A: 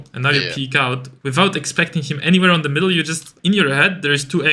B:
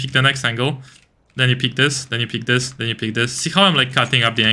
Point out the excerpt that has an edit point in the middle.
A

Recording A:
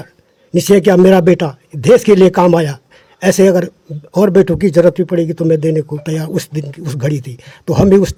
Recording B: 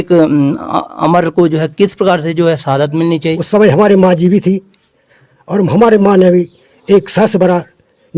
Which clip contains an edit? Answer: B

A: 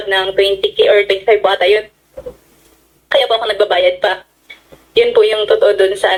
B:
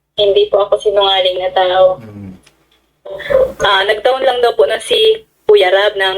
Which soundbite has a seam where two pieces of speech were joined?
B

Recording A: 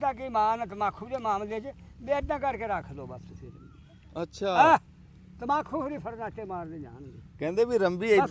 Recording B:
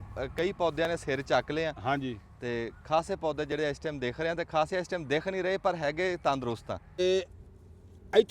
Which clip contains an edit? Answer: B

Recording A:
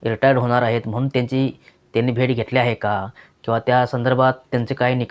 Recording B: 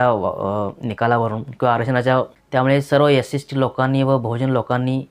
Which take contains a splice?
B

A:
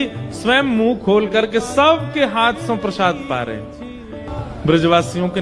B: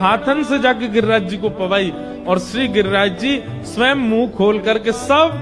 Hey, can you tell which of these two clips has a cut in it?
A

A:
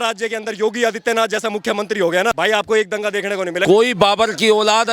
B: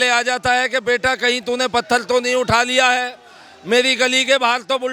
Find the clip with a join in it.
A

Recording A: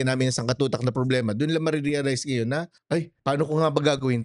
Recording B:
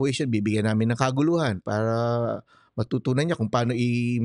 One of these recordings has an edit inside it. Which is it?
A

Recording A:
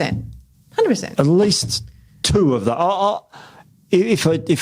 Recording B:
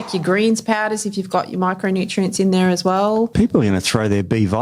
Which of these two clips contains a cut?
B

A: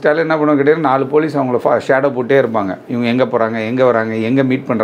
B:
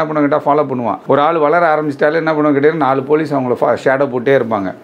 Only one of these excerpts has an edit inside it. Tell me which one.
B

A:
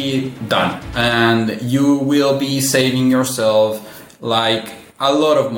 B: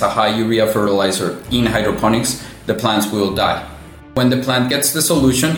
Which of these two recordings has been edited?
B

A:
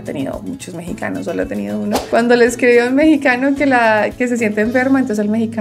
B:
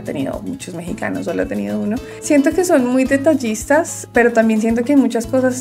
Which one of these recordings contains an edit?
A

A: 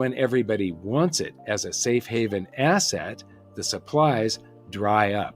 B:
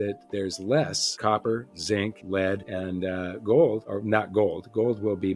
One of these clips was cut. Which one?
B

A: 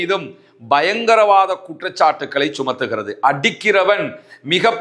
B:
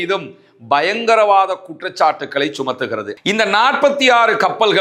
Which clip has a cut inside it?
B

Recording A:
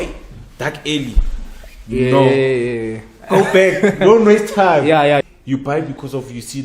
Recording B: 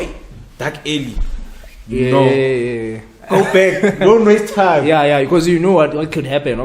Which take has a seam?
A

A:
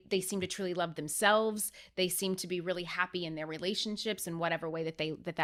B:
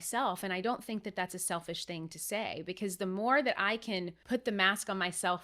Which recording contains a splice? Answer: B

